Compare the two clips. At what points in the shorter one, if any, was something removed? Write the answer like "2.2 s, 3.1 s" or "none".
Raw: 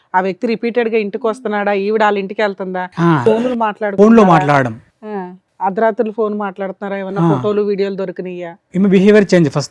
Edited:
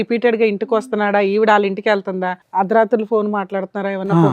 2.3 s